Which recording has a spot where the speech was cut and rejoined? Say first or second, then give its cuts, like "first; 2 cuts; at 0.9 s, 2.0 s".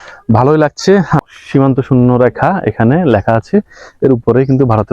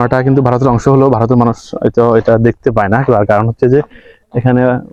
first; 1 cut; at 1.2 s